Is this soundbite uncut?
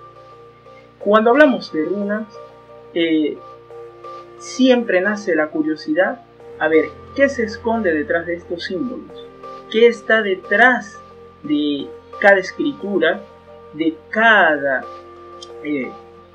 yes; 0 cuts

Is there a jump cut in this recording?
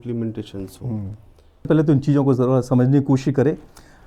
yes; 1 cut; at 1.7 s

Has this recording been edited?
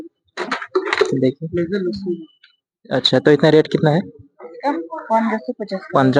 no; 0 cuts

